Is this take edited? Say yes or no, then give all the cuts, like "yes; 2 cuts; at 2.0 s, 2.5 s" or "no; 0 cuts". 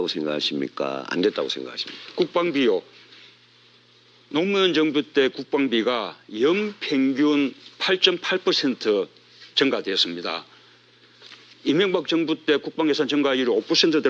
no; 0 cuts